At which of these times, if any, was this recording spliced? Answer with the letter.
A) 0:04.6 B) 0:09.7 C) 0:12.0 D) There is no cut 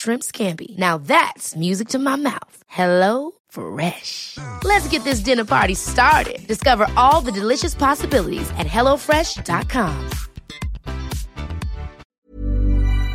C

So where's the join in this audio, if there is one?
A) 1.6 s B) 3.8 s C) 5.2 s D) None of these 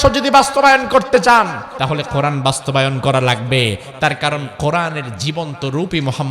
A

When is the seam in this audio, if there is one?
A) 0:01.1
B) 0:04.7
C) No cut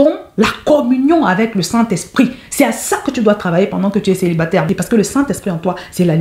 B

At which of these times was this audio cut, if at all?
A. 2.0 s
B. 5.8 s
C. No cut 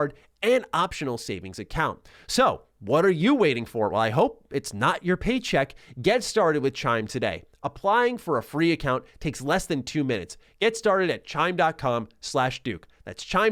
C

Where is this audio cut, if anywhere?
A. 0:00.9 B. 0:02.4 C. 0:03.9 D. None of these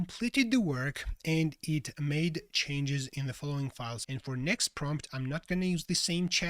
C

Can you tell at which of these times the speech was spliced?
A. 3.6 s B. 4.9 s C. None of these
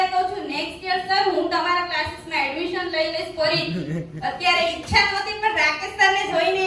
C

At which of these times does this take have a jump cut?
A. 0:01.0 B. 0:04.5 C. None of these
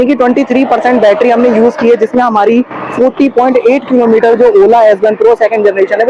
C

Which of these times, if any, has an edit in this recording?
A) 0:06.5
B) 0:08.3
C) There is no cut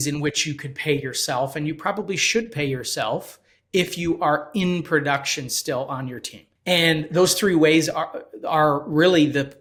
C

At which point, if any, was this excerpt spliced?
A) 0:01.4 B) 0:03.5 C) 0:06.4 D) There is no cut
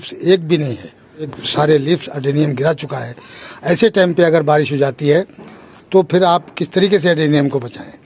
A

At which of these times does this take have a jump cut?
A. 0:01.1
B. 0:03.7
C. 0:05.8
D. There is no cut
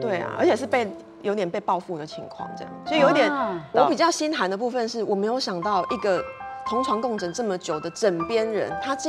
B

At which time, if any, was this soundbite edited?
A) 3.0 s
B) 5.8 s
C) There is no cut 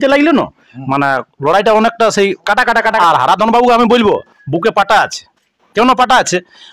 A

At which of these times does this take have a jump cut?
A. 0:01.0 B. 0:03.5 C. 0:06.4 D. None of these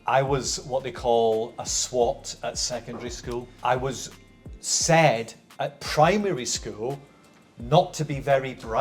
B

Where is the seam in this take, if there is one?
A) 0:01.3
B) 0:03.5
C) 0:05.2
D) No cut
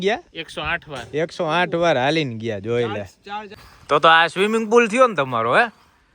B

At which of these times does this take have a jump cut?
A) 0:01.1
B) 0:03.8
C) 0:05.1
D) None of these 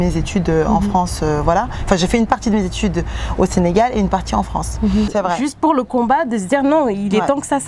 C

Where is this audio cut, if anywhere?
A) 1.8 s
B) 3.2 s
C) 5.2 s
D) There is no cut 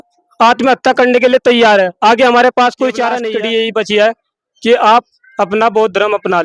B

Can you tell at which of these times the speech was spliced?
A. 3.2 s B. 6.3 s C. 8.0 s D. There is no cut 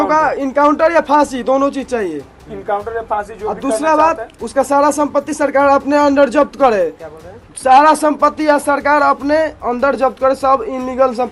D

